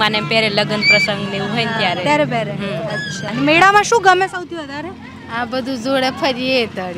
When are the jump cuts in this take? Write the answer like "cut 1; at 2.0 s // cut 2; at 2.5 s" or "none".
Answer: cut 1; at 3.2 s